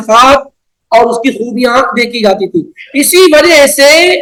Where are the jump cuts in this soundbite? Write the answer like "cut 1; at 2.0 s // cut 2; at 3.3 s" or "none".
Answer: none